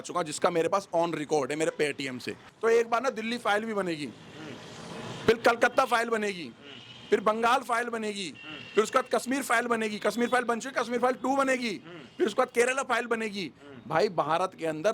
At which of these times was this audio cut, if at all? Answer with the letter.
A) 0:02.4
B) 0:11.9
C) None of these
A